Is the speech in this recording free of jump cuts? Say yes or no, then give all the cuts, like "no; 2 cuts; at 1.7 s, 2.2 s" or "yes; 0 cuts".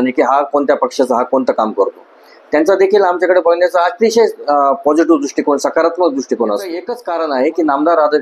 no; 1 cut; at 7.0 s